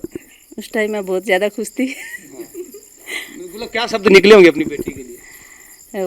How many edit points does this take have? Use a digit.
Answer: 0